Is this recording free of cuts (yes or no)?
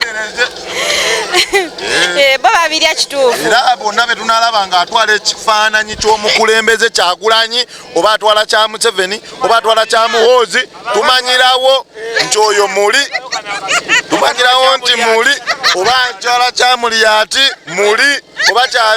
yes